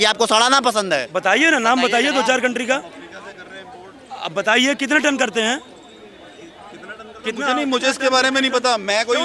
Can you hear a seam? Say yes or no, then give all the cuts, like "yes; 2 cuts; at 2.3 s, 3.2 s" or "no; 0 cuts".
yes; 1 cut; at 1.1 s